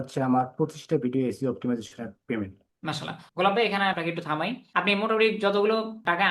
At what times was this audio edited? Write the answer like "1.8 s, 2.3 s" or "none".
none